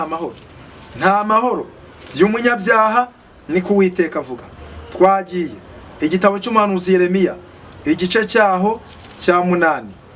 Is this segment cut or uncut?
uncut